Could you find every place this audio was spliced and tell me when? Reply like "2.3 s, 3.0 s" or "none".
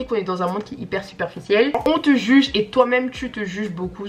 1.8 s